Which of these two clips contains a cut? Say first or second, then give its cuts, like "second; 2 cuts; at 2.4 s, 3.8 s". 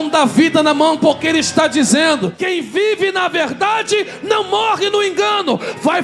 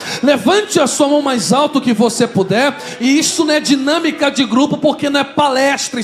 first; 1 cut; at 2.3 s